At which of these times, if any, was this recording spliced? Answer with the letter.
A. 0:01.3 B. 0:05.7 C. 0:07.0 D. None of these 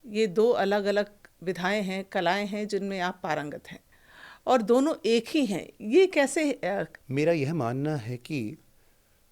C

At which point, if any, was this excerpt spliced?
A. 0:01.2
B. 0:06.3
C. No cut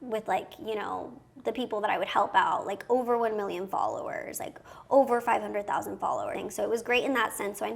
B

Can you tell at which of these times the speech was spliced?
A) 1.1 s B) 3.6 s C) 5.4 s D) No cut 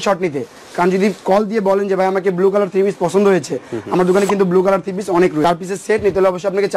C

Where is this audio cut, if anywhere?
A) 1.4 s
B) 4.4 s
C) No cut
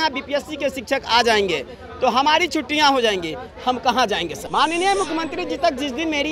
B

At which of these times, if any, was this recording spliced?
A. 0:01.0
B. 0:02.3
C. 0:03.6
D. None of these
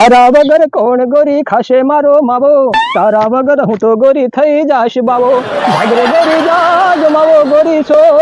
D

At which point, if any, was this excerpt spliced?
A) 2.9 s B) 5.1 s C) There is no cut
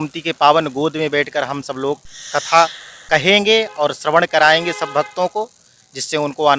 C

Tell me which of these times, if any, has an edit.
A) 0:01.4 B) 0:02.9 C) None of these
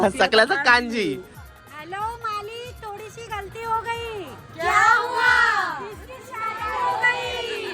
A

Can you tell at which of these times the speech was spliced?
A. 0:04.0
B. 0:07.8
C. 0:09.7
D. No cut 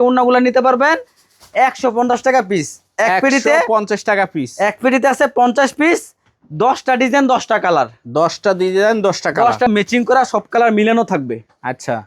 C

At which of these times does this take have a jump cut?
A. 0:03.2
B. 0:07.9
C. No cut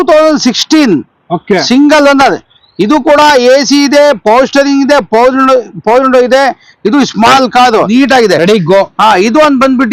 B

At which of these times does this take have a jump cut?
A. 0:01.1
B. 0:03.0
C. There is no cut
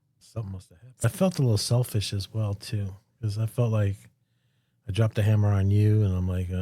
A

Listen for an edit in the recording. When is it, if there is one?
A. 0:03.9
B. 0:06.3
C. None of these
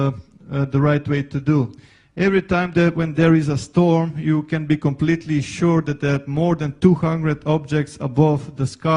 B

